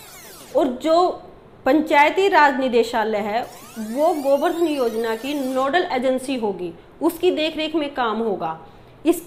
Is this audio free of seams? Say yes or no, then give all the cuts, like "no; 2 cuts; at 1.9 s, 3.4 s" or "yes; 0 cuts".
yes; 0 cuts